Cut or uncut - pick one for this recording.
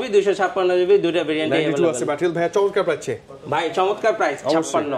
uncut